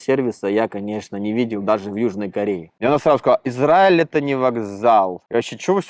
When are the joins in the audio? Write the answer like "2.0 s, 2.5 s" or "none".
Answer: 2.8 s